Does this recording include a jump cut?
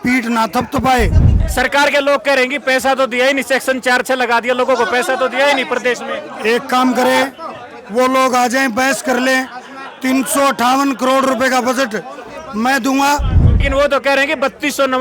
yes; 2 cuts; at 1.4 s, 13.5 s

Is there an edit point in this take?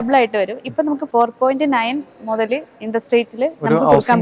yes; 1 cut; at 1.0 s

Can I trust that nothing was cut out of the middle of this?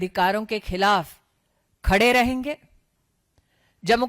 yes; 0 cuts

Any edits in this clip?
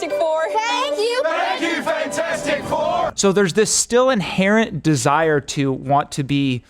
yes; 1 cut; at 3.1 s

